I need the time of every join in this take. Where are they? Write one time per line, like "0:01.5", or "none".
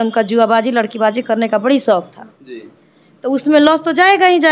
none